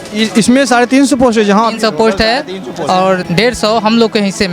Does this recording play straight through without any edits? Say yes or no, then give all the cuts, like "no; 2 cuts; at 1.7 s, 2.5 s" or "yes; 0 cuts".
no; 1 cut; at 3.2 s